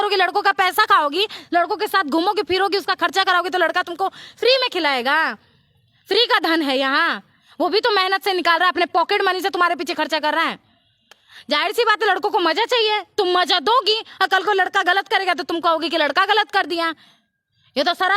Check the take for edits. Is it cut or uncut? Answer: uncut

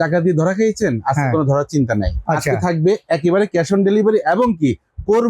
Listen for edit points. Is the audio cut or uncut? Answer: uncut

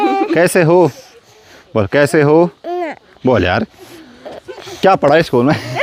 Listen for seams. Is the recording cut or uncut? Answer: uncut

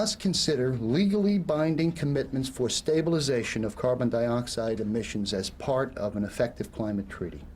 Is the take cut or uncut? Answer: cut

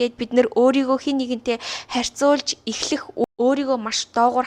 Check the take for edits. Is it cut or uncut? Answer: cut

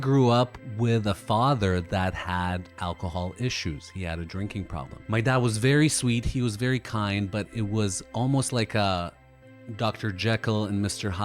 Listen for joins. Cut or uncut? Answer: uncut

